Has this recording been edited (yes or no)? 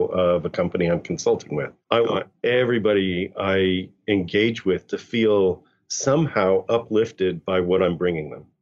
yes